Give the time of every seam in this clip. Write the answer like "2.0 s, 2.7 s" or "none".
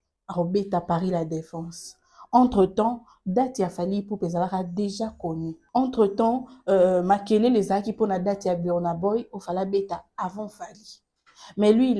5.6 s